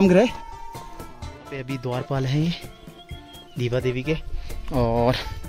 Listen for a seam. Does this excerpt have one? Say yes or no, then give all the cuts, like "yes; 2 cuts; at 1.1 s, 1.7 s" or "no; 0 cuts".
yes; 1 cut; at 1.3 s